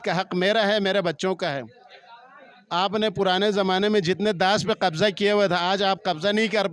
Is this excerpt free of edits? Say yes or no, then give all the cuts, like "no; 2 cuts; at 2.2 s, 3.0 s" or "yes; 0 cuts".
yes; 0 cuts